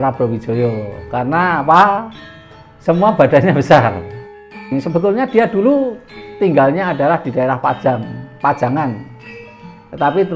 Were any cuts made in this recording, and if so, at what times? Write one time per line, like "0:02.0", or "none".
0:04.2